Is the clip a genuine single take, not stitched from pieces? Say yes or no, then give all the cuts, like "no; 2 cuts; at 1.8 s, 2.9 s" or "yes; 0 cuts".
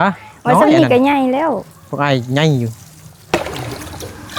no; 1 cut; at 3.2 s